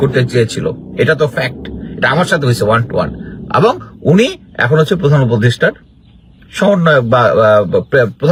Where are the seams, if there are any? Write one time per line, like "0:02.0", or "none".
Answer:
none